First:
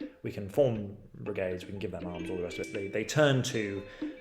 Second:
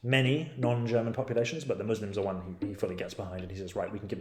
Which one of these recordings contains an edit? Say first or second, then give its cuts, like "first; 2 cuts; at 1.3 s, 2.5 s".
first; 1 cut; at 2.7 s